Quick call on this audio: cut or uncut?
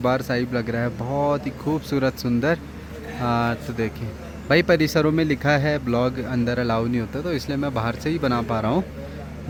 uncut